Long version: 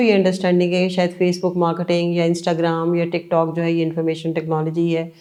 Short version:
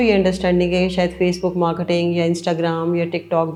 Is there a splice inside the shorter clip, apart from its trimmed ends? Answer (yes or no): no